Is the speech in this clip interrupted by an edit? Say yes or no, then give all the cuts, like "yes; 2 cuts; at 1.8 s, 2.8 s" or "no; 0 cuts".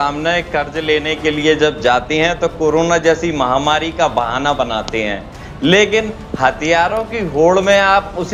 no; 0 cuts